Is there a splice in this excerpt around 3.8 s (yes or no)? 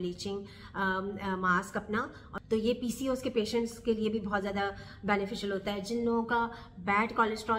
no